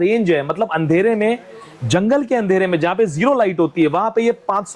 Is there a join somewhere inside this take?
no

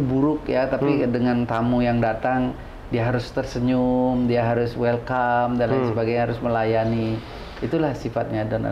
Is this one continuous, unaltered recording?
yes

